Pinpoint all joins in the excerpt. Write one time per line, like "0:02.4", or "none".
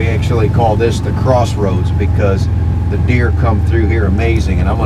none